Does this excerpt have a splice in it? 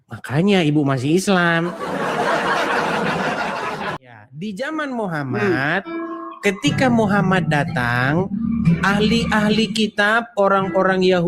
yes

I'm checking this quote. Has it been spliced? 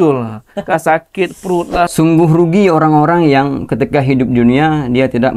yes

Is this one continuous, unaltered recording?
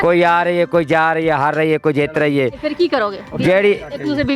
yes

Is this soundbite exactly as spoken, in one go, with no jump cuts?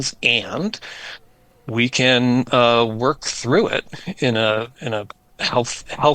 yes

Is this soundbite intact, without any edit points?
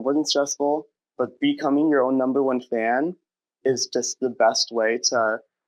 yes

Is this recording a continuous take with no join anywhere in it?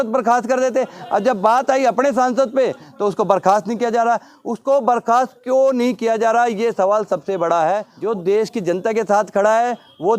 no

